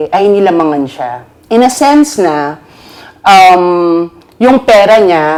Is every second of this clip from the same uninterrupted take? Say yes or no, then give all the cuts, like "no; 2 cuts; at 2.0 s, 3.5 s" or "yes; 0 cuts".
yes; 0 cuts